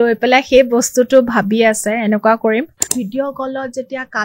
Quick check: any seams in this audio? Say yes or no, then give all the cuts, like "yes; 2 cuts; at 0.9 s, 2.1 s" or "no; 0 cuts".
yes; 1 cut; at 2.8 s